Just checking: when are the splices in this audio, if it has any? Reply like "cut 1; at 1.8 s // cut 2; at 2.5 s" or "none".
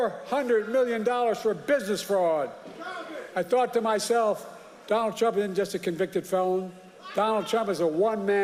none